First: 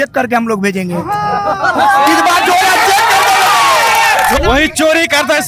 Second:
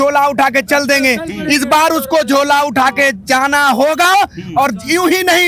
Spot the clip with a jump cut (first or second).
first